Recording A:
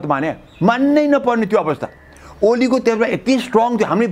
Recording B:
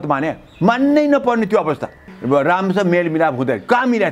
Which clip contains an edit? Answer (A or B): B